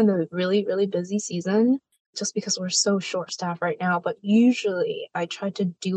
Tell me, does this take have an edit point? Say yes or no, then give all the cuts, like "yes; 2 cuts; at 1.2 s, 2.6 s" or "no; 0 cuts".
no; 0 cuts